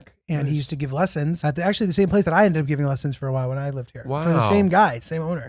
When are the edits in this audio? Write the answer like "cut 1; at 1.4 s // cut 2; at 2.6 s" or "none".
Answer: cut 1; at 1.4 s